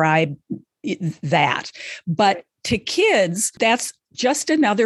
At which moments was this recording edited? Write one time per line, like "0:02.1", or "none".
0:03.4